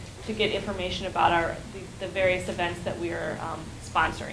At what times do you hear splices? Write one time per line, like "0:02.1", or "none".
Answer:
0:02.9